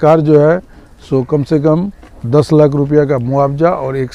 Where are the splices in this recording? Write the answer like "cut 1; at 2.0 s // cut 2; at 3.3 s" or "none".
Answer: none